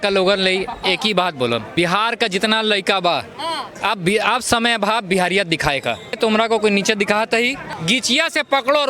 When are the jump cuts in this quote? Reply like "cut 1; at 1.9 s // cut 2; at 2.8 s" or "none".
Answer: cut 1; at 1.7 s // cut 2; at 6.2 s